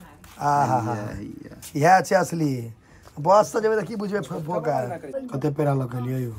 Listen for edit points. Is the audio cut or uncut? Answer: cut